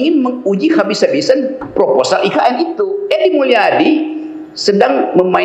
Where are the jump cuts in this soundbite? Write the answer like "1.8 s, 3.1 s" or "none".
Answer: 2.9 s